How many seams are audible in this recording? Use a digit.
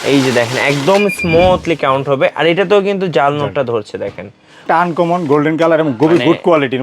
1